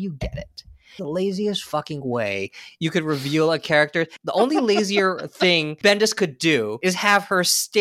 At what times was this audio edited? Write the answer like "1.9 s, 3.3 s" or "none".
0.9 s, 4.1 s, 5.7 s, 6.7 s

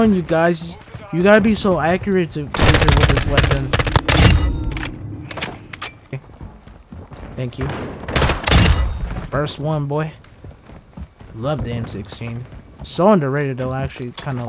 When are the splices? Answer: 6.1 s

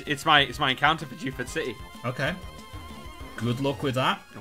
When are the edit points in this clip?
1.9 s

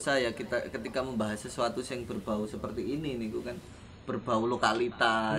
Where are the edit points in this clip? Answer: none

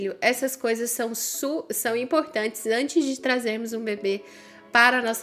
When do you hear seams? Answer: none

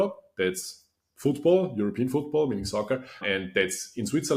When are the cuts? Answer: 3.2 s

